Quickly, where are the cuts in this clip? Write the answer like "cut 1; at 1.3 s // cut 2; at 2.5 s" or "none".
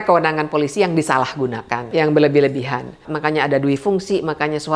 cut 1; at 1.9 s // cut 2; at 3.1 s